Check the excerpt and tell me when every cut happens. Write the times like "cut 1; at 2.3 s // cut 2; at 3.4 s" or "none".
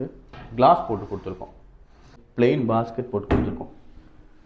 cut 1; at 2.2 s